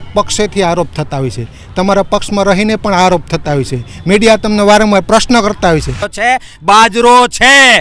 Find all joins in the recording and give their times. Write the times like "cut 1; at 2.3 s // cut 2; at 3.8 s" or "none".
cut 1; at 6.0 s